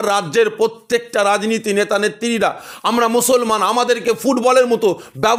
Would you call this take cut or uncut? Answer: uncut